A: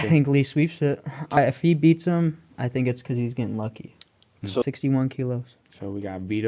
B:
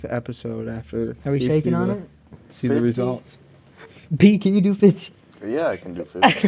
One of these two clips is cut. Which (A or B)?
A